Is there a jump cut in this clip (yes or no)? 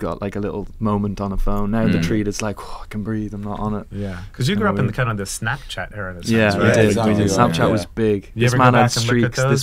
no